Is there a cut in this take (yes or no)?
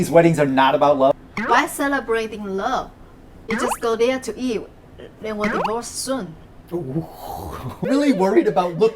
yes